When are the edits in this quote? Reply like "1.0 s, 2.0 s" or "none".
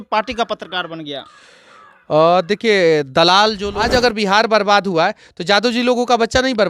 3.7 s